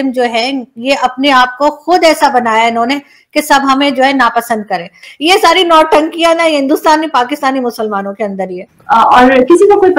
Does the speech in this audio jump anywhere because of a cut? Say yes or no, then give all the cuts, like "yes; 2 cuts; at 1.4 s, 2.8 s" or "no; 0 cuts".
yes; 2 cuts; at 4.9 s, 8.7 s